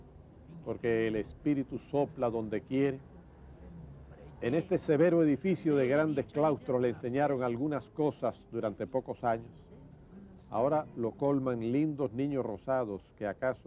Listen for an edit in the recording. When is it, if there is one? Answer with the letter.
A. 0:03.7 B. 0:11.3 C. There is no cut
C